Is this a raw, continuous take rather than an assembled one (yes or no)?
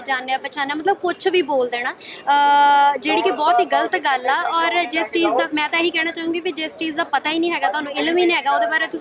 yes